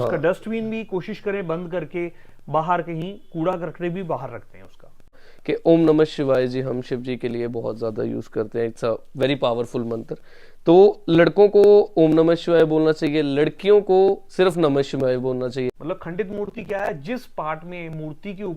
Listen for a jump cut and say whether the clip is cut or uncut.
cut